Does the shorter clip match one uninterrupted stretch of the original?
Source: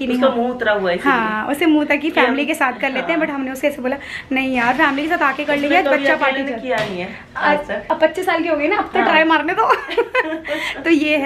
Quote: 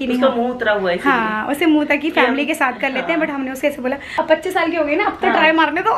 no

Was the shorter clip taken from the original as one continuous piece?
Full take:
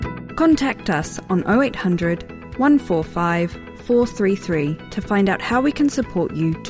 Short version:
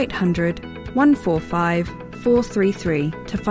yes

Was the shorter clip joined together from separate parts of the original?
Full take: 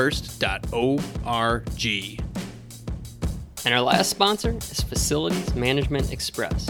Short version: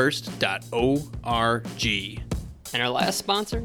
yes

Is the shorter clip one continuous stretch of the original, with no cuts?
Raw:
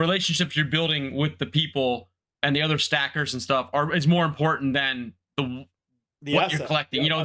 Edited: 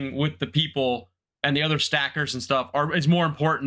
yes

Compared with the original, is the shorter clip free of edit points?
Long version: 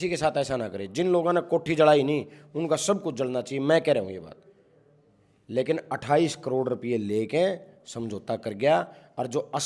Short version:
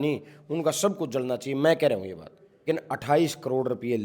no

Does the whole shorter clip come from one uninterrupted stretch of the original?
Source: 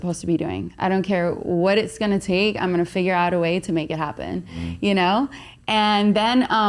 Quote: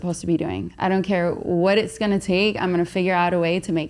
yes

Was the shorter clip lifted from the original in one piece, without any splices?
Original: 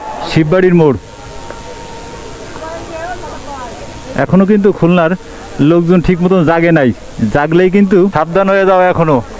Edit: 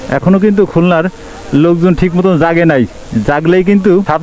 yes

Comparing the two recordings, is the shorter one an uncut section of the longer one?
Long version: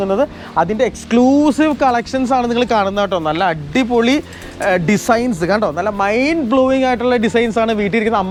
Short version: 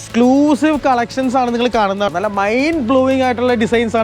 no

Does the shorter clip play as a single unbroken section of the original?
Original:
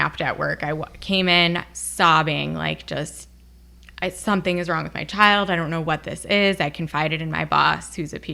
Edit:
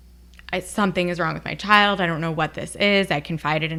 yes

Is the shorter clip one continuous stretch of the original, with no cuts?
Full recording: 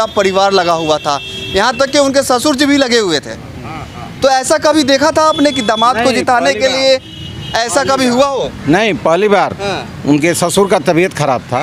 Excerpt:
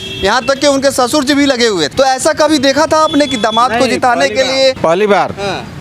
no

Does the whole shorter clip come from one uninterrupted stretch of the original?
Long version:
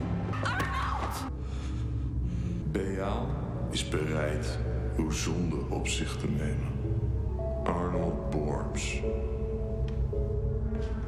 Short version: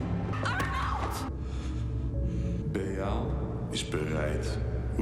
yes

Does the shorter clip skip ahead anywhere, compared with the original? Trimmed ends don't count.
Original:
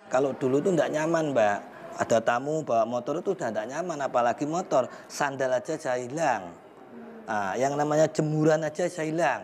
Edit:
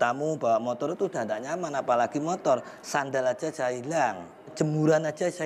yes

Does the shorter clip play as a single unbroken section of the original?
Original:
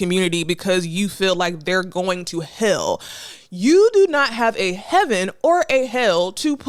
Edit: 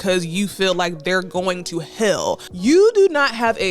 no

